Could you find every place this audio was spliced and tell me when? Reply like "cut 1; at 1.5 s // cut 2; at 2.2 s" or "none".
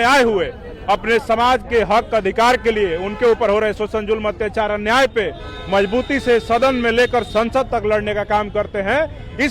none